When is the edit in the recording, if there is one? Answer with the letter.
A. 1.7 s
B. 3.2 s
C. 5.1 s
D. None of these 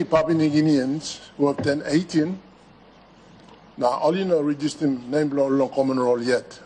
D